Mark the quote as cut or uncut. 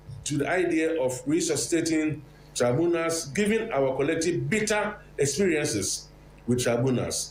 uncut